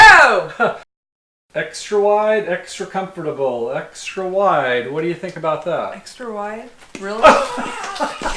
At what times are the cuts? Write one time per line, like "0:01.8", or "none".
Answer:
0:01.0